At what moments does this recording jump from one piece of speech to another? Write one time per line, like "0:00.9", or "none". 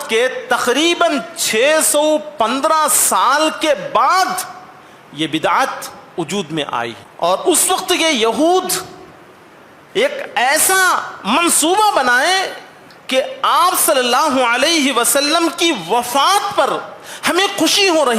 0:07.0